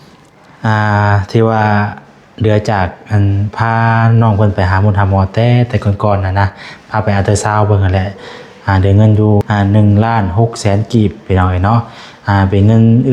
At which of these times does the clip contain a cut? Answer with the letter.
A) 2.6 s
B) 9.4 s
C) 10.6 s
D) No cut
B